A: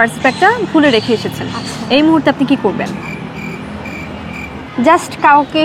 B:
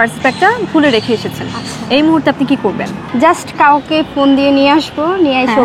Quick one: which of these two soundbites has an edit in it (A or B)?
B